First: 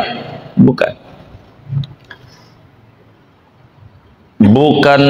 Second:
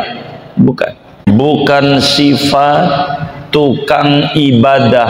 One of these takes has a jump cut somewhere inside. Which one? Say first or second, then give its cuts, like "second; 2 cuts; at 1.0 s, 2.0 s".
second; 1 cut; at 1.3 s